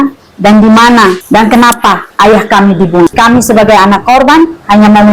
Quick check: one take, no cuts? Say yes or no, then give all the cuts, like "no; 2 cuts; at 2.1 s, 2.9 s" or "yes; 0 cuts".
no; 3 cuts; at 1.2 s, 2.1 s, 3.1 s